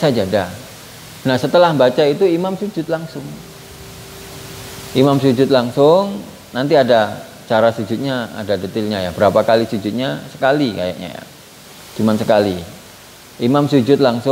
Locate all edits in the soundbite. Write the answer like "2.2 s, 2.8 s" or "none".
none